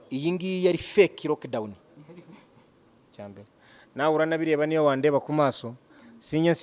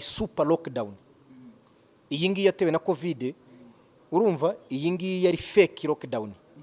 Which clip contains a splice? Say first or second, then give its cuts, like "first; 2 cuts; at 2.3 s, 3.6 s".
first; 1 cut; at 3.1 s